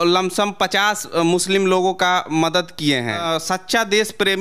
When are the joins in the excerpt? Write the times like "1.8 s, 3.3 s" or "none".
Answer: 3.2 s